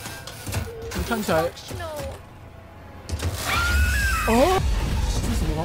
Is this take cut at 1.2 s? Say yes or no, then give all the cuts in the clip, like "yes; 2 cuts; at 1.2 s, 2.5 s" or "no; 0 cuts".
no; 1 cut; at 4.6 s